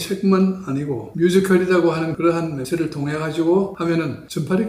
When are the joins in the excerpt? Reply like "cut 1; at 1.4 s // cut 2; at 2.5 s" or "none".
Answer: cut 1; at 1.0 s

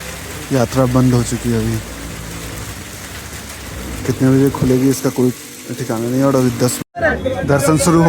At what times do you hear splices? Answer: cut 1; at 6.8 s

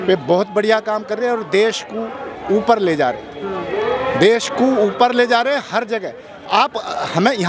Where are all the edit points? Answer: none

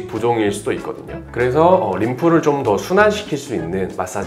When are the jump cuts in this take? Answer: none

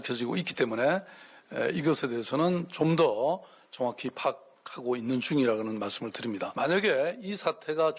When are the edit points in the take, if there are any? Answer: cut 1; at 6.5 s

